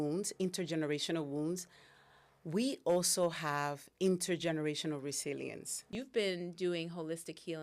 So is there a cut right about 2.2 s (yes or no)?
no